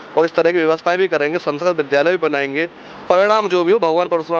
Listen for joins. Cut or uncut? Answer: cut